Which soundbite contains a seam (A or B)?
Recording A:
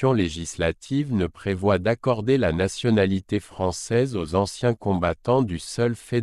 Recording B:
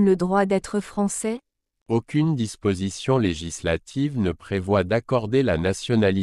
B